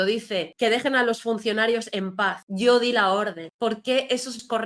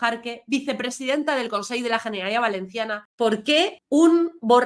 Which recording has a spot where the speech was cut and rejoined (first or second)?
second